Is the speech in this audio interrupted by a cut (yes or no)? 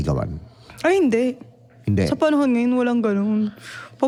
no